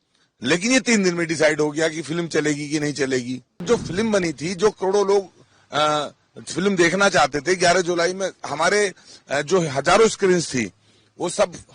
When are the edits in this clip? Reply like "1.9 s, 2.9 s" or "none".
3.6 s